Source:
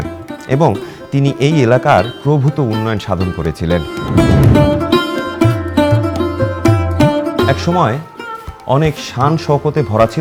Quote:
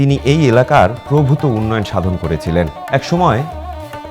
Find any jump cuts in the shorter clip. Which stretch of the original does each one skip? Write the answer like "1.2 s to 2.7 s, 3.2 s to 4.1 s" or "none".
4.1 s to 7.5 s